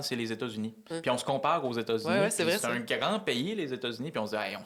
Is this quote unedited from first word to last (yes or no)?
yes